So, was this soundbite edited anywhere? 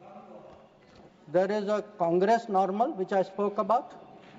no; 0 cuts

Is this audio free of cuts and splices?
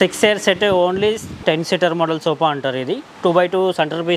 no; 1 cut; at 1.4 s

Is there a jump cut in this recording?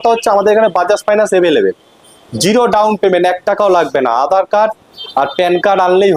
no; 0 cuts

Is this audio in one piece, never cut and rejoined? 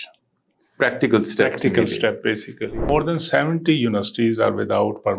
no; 1 cut; at 2.9 s

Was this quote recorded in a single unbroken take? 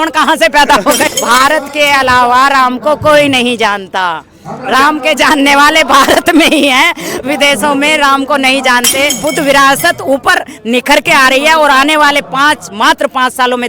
no; 2 cuts; at 1.0 s, 9.2 s

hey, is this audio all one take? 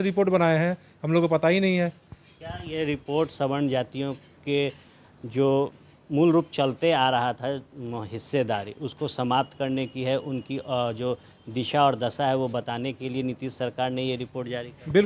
yes; 0 cuts

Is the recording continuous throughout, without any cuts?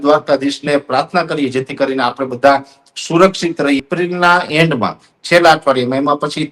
no; 1 cut; at 3.8 s

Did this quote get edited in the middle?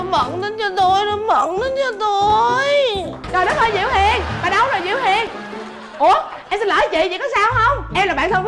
yes; 1 cut; at 3.2 s

